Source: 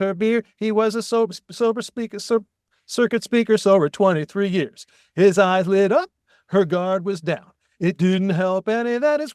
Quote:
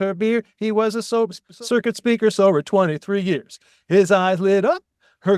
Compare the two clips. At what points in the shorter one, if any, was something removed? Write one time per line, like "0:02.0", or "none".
0:01.4